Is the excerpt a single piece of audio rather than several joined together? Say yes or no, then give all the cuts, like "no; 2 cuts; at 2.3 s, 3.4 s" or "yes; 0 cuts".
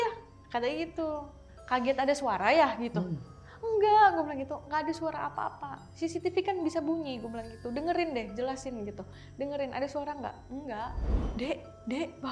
no; 2 cuts; at 4.6 s, 11.0 s